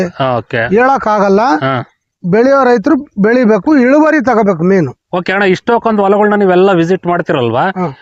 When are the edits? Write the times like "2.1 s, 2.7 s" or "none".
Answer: none